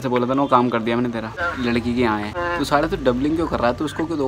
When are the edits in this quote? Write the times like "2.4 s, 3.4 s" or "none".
1.4 s, 2.3 s